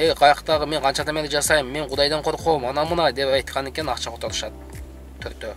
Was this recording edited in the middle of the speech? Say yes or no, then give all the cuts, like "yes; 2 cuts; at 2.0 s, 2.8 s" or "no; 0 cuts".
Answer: no; 0 cuts